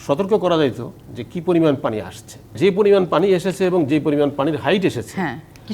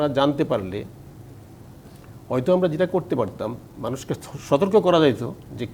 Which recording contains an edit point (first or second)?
first